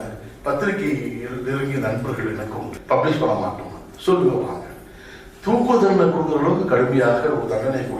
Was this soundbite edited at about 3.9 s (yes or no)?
no